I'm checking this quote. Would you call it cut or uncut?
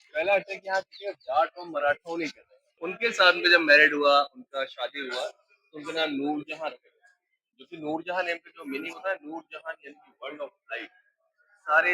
cut